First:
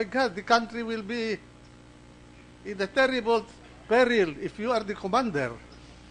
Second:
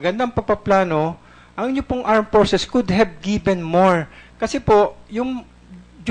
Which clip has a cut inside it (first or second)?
second